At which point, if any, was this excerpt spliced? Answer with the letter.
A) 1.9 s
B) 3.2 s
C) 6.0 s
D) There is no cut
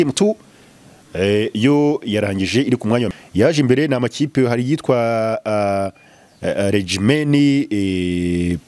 B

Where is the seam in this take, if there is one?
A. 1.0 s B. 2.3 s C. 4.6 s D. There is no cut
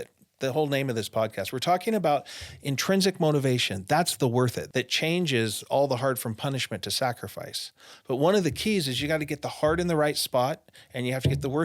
C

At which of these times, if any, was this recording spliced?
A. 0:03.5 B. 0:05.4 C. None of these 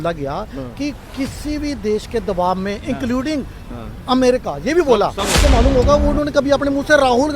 B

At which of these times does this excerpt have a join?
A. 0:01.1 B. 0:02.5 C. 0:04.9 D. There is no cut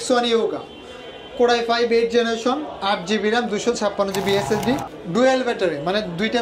C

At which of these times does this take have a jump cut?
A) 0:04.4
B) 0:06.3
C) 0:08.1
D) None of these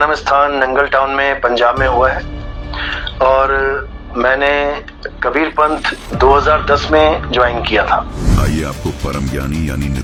D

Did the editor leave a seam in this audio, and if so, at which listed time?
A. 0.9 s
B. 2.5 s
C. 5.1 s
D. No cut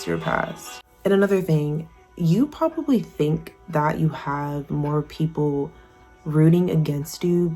A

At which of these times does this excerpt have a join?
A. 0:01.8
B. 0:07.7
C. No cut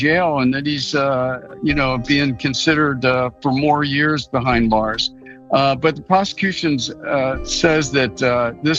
C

